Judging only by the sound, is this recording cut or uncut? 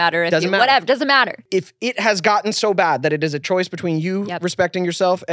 cut